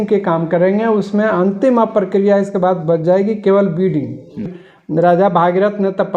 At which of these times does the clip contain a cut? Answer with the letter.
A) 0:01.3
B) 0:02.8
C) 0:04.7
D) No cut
C